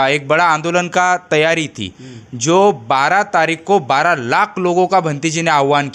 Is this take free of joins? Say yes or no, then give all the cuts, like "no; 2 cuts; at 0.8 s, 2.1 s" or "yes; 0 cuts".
yes; 0 cuts